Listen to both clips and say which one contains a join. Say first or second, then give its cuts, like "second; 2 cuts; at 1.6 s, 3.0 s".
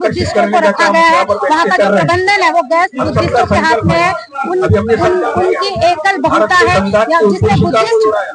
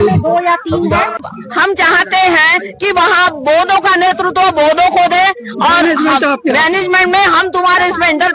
second; 1 cut; at 1.3 s